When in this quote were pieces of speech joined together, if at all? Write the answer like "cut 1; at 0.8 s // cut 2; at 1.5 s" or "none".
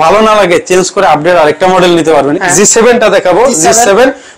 cut 1; at 2.4 s